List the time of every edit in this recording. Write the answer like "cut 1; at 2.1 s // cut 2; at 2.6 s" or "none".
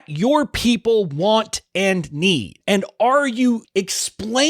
cut 1; at 2.5 s // cut 2; at 3.6 s